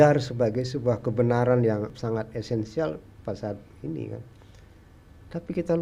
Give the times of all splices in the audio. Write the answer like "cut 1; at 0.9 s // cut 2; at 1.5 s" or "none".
cut 1; at 2.0 s